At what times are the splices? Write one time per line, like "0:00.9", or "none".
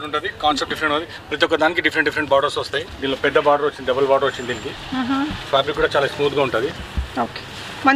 0:02.9
0:06.9